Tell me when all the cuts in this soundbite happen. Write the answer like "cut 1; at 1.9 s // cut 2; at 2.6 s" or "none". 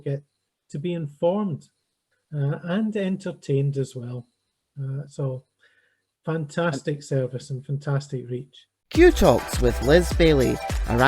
cut 1; at 8.9 s